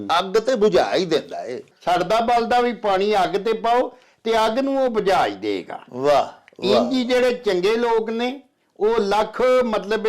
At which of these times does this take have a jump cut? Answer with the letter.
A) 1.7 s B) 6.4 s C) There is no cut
A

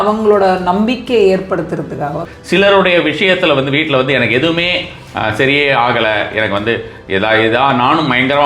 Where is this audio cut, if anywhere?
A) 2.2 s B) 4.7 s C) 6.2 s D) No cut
A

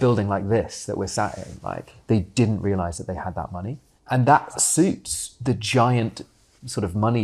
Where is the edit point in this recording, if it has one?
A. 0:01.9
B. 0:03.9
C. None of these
A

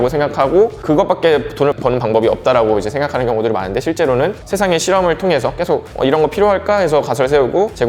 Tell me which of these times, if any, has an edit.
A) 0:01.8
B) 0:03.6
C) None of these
A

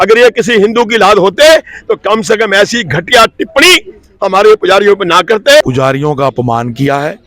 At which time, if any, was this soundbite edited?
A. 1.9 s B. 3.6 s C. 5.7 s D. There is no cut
C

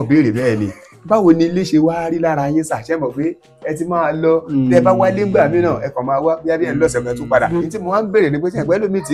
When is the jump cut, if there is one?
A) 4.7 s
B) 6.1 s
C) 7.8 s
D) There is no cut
C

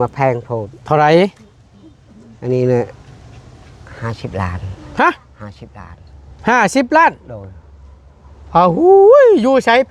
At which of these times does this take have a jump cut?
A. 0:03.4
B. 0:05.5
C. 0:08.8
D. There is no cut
D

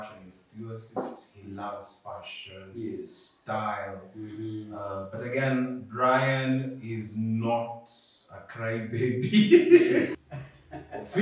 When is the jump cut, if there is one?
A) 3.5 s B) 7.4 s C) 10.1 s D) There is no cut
C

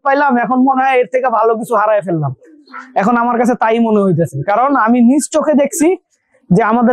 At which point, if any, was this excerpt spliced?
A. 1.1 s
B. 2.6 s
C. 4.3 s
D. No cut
D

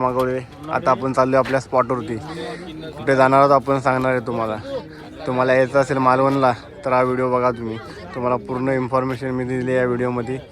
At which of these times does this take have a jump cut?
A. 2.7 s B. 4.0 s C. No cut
C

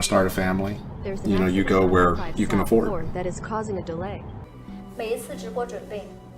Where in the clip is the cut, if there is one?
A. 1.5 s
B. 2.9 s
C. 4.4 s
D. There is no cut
C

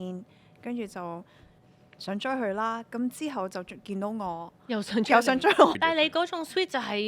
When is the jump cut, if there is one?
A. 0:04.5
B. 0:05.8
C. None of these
B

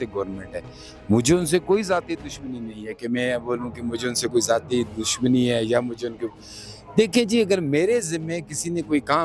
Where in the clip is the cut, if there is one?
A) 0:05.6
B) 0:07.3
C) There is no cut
C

